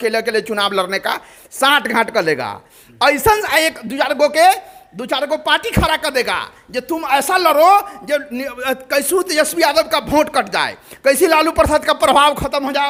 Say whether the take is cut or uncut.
uncut